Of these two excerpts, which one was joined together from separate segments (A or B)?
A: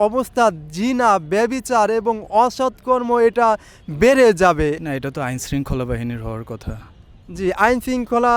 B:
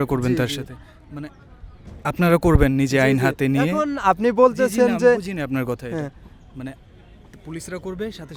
A